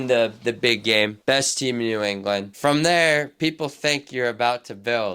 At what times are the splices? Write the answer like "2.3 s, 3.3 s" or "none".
none

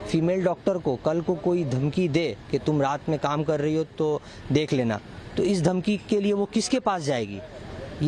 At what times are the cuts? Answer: none

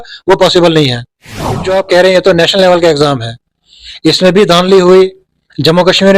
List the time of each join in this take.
1.5 s

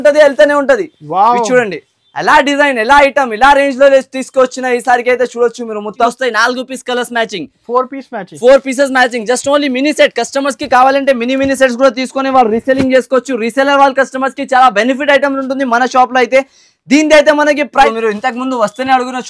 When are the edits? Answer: 6.1 s, 17.9 s

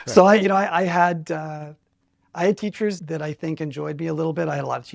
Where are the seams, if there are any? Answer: 3.0 s

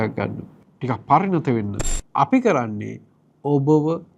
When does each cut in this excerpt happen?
1.8 s

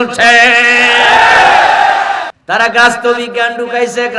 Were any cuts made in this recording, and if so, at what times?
2.3 s

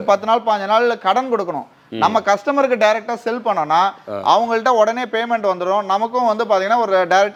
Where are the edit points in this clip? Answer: none

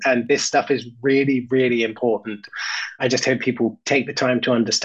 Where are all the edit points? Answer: none

